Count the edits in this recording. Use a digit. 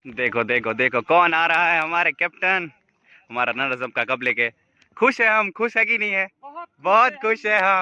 0